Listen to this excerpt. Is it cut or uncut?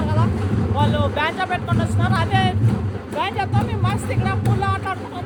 uncut